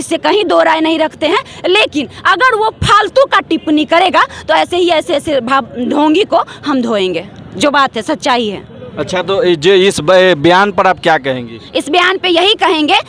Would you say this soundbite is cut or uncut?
uncut